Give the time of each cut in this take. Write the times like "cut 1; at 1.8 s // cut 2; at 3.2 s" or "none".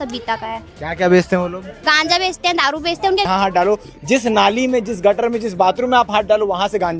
cut 1; at 3.3 s